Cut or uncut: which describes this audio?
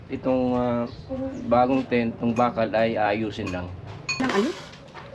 cut